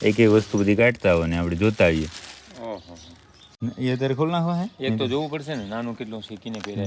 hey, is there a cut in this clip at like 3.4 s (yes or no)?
yes